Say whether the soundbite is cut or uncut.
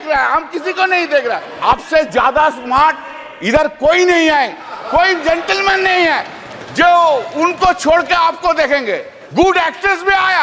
cut